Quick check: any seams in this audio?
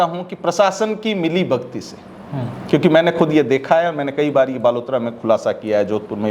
no; 0 cuts

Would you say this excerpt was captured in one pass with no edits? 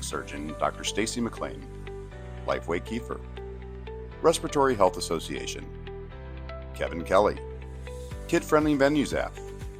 no; 2 cuts; at 5.3 s, 6.8 s

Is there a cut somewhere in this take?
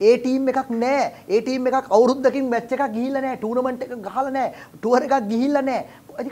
no; 0 cuts

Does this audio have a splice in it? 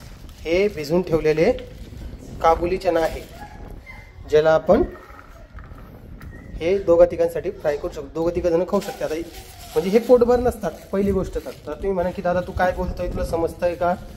no; 0 cuts

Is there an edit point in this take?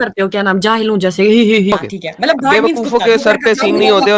yes; 1 cut; at 1.7 s

